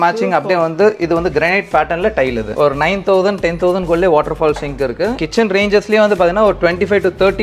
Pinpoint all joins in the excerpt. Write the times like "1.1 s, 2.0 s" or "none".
2.5 s, 5.2 s